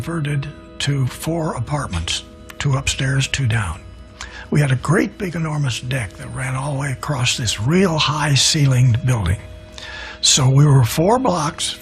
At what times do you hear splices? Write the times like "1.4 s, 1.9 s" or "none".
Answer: 3.4 s